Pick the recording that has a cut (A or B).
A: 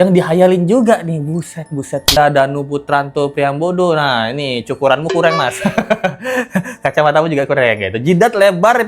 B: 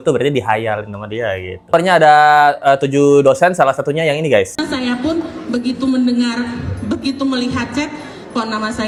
A